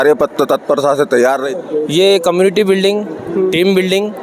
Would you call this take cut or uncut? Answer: cut